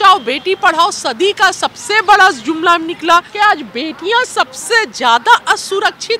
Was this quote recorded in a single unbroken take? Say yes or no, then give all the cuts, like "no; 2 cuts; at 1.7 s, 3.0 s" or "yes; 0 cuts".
no; 1 cut; at 3.3 s